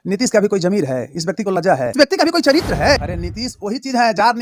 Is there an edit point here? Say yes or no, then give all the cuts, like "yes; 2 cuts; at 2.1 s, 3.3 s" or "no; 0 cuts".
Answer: yes; 2 cuts; at 1.9 s, 3.0 s